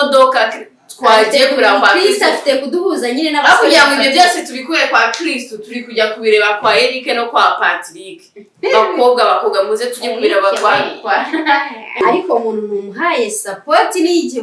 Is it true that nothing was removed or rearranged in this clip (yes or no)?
no